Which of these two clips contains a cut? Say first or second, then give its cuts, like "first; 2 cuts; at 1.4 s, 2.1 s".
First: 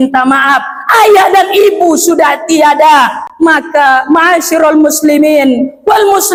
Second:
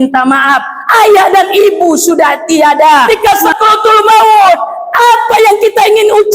second; 1 cut; at 3.1 s